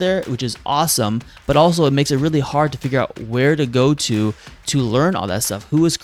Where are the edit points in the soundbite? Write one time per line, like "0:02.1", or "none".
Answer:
none